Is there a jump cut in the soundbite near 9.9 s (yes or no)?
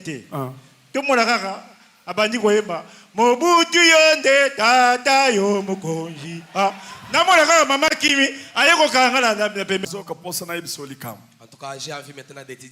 yes